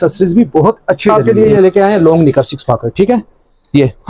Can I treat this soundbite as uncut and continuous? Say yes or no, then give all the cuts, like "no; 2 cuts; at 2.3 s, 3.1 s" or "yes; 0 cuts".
no; 1 cut; at 1.1 s